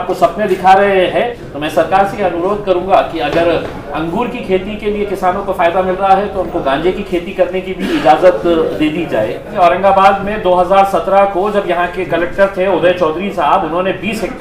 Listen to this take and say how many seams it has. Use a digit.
2